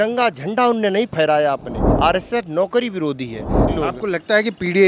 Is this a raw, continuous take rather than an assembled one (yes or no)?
no